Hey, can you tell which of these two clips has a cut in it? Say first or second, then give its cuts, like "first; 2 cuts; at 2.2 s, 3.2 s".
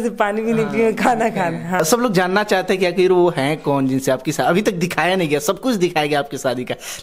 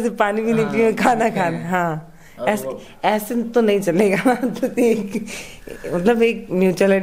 first; 1 cut; at 1.8 s